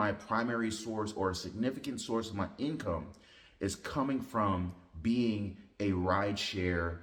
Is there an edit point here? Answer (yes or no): no